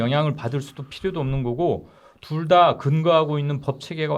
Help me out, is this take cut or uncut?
uncut